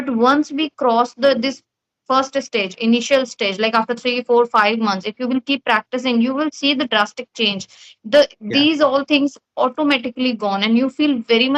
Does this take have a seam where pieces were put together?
no; 0 cuts

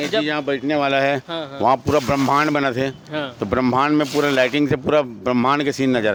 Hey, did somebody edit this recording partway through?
no; 0 cuts

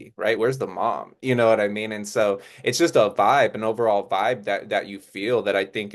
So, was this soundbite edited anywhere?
no; 0 cuts

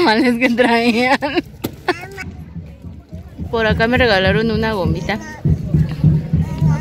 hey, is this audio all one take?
yes; 0 cuts

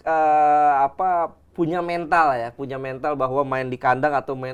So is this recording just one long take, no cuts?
yes; 0 cuts

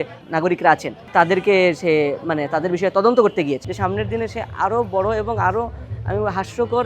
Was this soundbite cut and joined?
yes; 2 cuts; at 1.0 s, 3.7 s

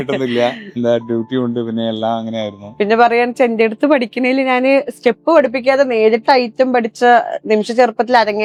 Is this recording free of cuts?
yes; 0 cuts

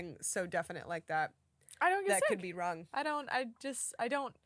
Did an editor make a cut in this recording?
no; 0 cuts

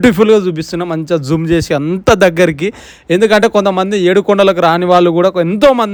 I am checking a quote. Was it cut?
no; 0 cuts

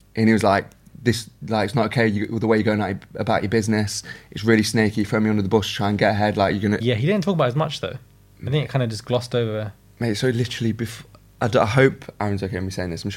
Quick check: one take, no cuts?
no; 1 cut; at 6.8 s

